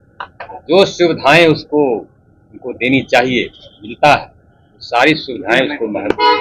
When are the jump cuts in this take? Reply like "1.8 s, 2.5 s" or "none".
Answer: none